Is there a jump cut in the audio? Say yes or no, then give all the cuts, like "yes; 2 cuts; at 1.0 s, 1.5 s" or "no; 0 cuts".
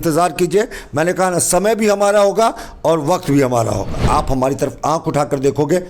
yes; 1 cut; at 4.0 s